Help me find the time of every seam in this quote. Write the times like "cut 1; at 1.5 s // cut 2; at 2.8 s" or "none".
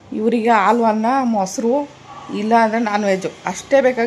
none